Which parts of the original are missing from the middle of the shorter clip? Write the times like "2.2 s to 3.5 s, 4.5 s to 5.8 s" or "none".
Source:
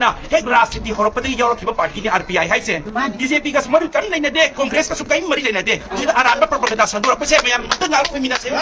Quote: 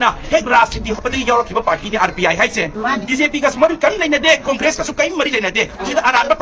1.0 s to 1.1 s